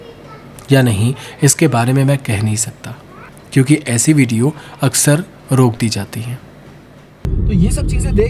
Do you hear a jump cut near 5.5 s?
no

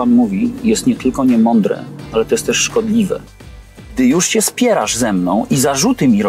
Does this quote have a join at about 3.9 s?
yes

